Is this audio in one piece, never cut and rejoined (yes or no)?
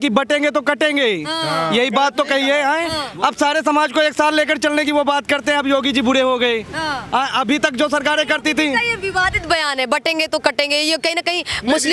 yes